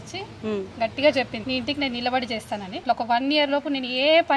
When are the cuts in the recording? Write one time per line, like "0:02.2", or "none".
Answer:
0:01.4
0:02.8